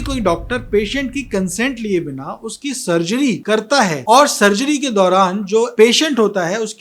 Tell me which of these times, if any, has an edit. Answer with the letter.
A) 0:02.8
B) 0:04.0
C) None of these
B